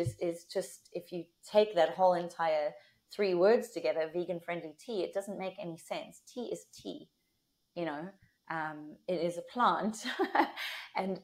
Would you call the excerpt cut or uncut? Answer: uncut